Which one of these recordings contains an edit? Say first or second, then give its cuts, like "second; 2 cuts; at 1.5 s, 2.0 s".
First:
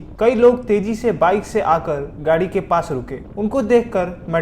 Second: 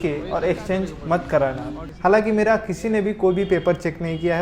second; 1 cut; at 1.8 s